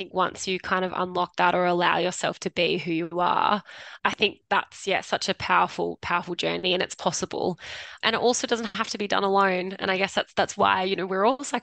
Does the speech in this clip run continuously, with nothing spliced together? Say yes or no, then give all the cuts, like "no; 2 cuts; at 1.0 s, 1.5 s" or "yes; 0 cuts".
yes; 0 cuts